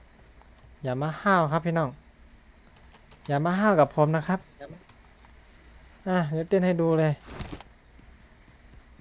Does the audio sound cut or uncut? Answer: uncut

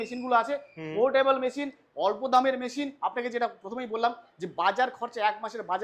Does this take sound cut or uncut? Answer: uncut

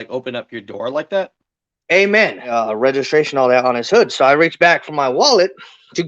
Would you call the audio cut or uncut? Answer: cut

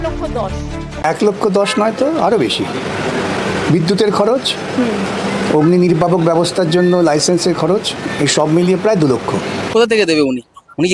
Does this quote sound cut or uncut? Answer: cut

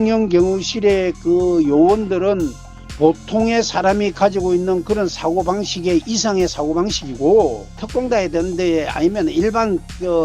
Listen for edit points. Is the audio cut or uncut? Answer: cut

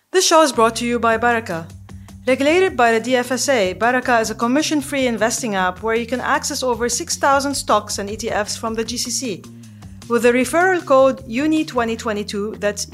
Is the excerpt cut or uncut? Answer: uncut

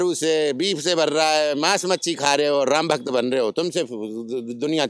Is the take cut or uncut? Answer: uncut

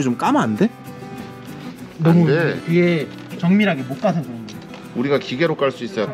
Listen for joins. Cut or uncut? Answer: uncut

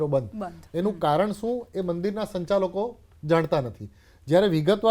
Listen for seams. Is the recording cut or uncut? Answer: uncut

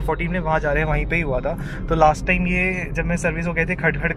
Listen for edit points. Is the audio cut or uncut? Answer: uncut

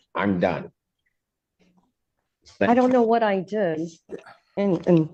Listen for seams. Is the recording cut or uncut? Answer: uncut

